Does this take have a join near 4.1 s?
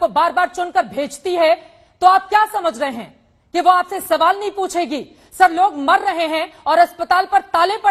no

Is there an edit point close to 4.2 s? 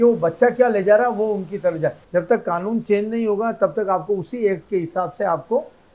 no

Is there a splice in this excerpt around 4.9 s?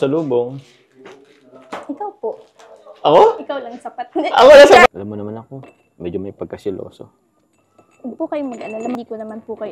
yes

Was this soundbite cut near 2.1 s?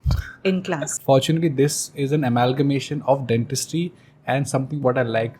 no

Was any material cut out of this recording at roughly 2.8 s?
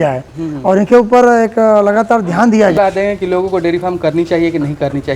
yes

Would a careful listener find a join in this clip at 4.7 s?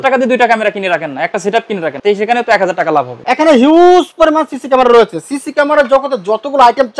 no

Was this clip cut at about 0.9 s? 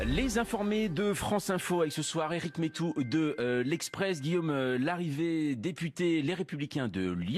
no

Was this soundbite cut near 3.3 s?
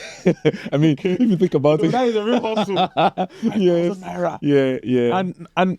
no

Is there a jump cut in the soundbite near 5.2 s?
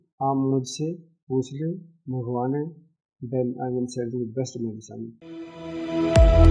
yes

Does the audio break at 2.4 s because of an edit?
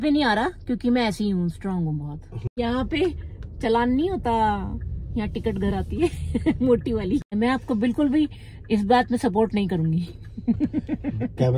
yes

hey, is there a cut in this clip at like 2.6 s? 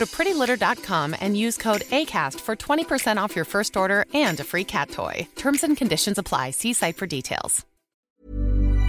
no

